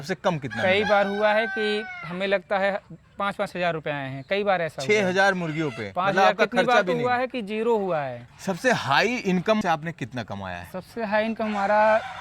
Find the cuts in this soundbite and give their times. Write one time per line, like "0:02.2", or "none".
0:08.2
0:09.6